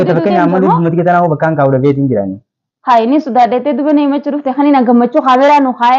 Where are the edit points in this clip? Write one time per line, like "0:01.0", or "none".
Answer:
none